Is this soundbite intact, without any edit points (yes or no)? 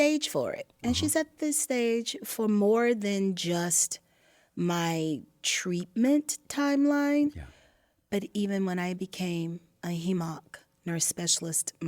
yes